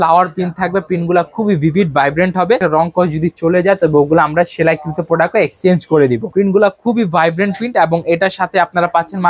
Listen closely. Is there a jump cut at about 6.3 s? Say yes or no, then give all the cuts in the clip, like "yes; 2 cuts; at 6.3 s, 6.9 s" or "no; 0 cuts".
yes; 2 cuts; at 2.6 s, 6.3 s